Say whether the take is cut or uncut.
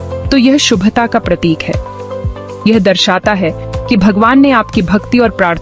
uncut